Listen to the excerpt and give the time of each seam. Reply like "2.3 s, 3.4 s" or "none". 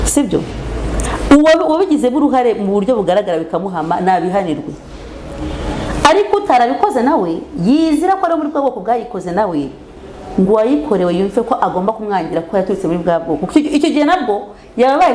none